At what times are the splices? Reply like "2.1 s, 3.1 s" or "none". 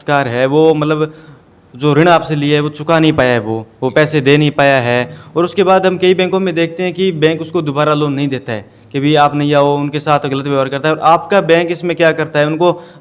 none